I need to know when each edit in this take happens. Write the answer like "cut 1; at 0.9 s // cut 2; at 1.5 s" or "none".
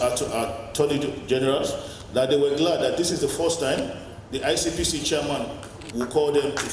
none